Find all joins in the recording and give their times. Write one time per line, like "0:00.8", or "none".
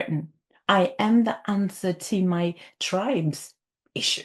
none